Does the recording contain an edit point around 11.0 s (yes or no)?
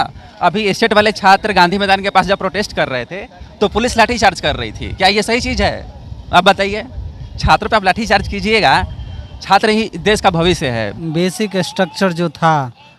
yes